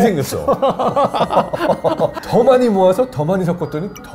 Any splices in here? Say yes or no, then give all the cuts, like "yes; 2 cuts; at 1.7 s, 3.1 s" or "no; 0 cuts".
yes; 1 cut; at 2.2 s